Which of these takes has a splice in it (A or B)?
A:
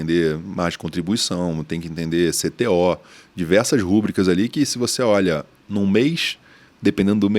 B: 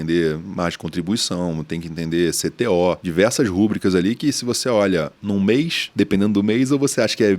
B